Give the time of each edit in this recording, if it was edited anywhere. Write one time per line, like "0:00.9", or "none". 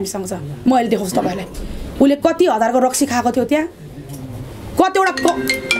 none